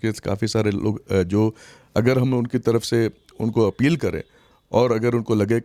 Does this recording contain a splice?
no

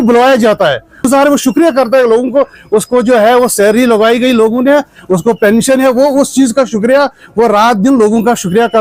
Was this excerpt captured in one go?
no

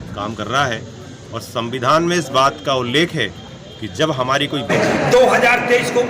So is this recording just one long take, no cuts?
no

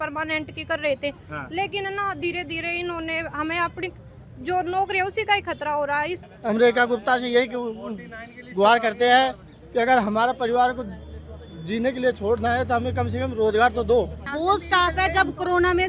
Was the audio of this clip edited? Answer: yes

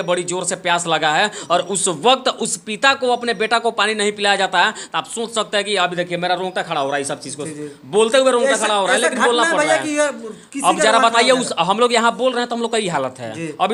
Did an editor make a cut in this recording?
no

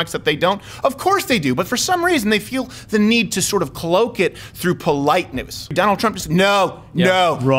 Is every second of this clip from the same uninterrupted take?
no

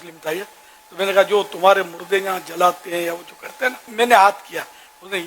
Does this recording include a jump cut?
yes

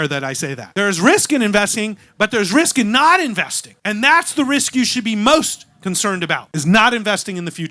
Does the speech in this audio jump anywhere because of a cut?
yes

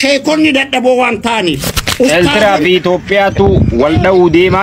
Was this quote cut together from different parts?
yes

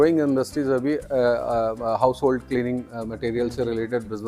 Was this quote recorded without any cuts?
yes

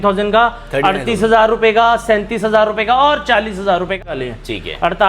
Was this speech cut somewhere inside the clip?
yes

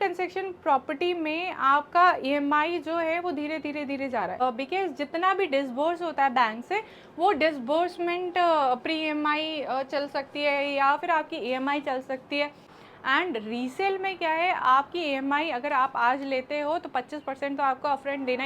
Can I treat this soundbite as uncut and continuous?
no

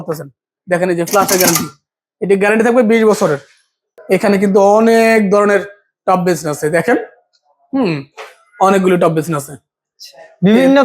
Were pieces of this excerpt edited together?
yes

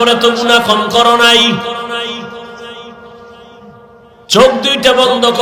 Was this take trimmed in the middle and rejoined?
no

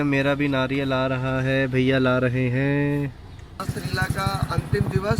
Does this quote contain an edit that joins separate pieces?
yes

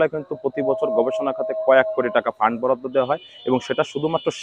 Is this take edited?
no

